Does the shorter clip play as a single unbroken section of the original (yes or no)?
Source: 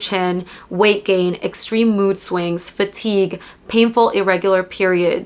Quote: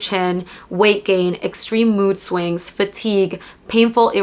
yes